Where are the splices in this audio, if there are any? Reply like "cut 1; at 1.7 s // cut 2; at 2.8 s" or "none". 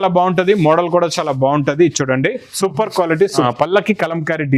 cut 1; at 3.4 s